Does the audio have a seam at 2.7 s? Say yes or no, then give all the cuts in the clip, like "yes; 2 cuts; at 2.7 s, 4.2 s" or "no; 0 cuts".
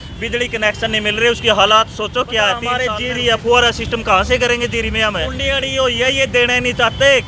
yes; 2 cuts; at 2.7 s, 5.4 s